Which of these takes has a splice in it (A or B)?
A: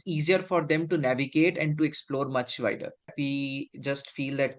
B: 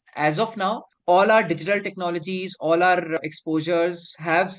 A